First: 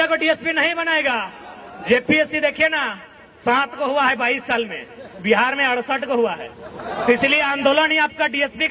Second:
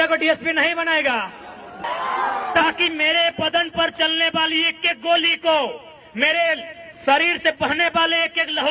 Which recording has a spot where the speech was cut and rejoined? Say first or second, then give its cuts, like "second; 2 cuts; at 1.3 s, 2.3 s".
second; 1 cut; at 1.8 s